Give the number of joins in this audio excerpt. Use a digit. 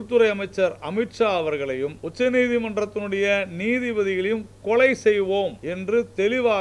2